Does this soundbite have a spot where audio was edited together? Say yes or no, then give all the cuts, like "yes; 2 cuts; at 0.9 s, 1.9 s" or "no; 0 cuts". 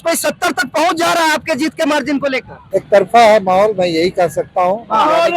yes; 1 cut; at 2.6 s